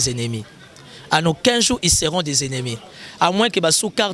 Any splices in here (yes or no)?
no